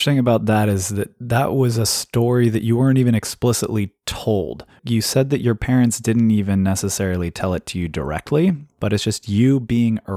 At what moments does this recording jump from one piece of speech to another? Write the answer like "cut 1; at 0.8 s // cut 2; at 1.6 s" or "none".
none